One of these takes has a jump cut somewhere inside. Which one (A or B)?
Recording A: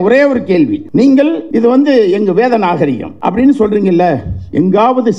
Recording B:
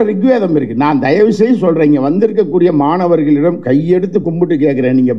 A